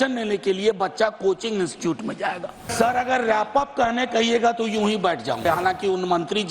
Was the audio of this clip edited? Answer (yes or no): yes